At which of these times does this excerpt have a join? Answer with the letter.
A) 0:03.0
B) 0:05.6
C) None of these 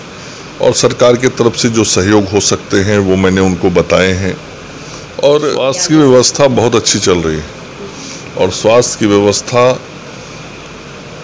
B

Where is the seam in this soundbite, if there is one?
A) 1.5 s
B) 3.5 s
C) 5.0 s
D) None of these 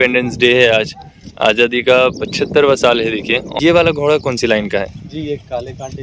B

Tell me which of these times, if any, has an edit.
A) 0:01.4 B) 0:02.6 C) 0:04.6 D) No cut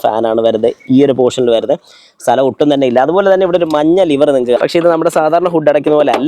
C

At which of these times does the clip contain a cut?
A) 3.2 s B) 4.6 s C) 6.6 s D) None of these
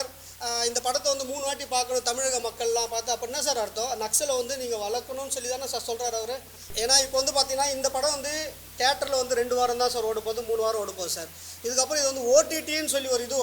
C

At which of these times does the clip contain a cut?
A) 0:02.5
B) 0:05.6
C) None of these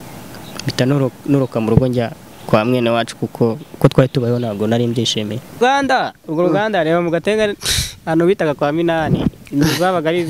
B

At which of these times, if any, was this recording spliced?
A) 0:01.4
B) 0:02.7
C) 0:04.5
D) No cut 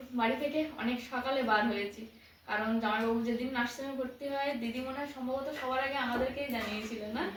D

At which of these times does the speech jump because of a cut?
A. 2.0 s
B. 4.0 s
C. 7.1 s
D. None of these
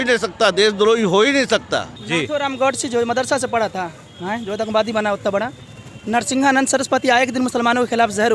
A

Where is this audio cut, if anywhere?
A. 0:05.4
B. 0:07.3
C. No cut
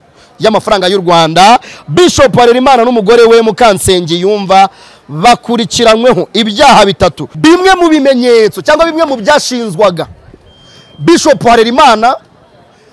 B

